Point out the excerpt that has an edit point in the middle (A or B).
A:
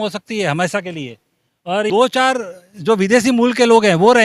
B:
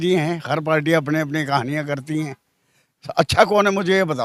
A